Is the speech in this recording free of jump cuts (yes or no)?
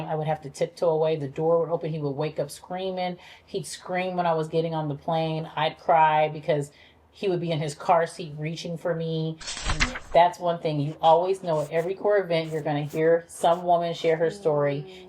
no